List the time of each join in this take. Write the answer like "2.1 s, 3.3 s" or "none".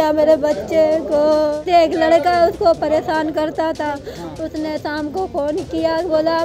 1.5 s